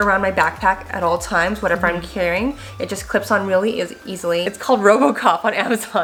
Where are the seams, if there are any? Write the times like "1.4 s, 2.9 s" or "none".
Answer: none